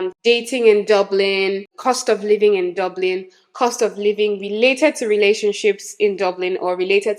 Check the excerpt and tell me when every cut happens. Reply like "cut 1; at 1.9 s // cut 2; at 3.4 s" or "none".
none